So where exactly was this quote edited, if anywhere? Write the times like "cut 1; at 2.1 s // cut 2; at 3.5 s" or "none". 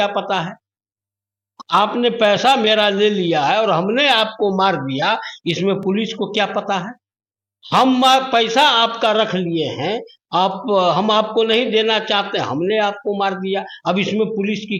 none